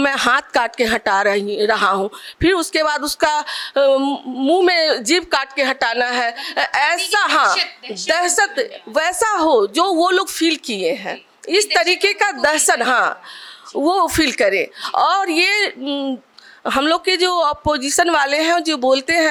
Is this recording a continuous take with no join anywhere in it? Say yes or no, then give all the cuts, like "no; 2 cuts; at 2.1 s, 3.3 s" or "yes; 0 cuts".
yes; 0 cuts